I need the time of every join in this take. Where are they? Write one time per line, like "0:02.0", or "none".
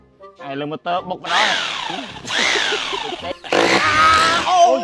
0:03.4